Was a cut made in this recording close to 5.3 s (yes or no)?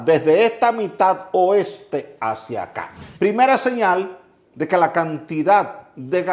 no